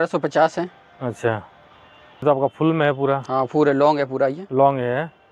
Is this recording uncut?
yes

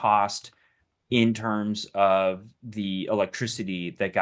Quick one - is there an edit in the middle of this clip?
no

